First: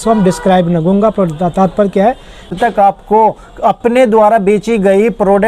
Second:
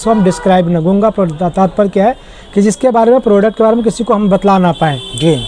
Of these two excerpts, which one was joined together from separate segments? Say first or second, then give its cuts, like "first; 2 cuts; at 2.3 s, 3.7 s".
first; 1 cut; at 2.5 s